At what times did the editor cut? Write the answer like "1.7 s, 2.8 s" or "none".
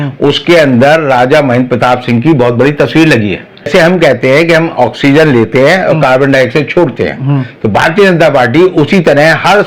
3.7 s